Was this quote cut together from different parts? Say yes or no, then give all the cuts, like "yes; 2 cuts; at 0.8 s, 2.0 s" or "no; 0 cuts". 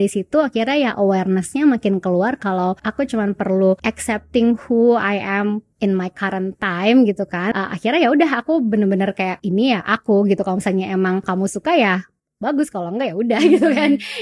yes; 5 cuts; at 2.8 s, 3.8 s, 7.4 s, 9.4 s, 11.3 s